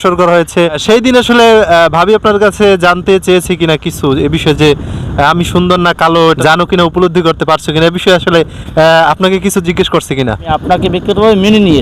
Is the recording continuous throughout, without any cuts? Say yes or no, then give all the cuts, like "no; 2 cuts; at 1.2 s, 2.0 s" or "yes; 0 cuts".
no; 3 cuts; at 0.8 s, 6.4 s, 10.6 s